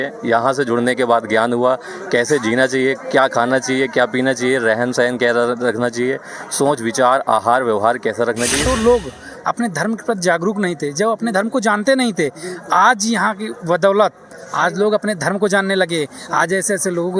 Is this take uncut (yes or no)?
no